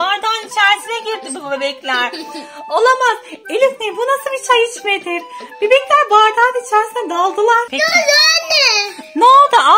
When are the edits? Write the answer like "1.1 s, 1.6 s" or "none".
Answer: 7.7 s

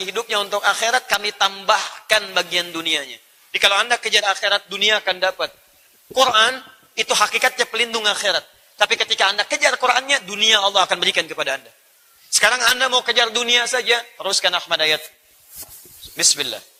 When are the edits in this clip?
none

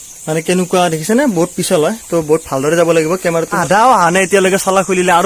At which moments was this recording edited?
3.6 s

